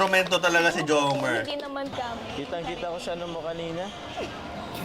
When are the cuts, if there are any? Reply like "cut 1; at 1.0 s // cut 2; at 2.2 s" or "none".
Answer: cut 1; at 1.9 s